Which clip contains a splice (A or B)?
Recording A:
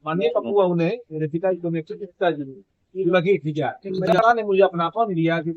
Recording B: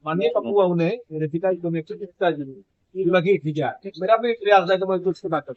A